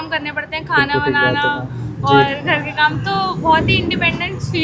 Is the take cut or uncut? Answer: uncut